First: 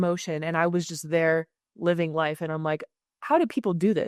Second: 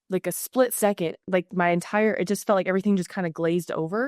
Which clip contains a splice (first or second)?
second